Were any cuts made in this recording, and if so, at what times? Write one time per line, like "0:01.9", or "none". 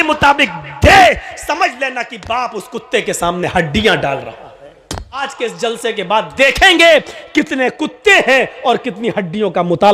0:05.2